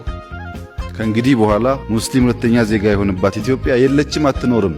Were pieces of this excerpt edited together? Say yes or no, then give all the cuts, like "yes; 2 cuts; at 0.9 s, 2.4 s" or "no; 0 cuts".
no; 0 cuts